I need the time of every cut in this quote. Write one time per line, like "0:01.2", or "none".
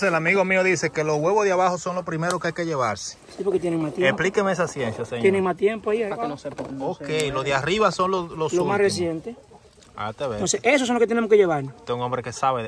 none